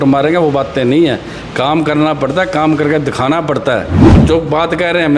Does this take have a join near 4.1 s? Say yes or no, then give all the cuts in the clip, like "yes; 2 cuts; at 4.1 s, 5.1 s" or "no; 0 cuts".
yes; 1 cut; at 4.1 s